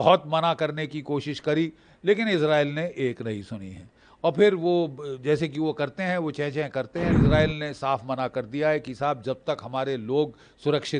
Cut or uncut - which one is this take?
cut